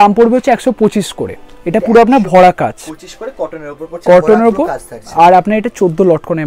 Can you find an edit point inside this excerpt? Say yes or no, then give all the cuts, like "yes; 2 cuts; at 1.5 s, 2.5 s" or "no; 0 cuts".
no; 0 cuts